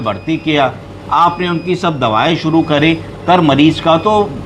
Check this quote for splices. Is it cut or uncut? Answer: uncut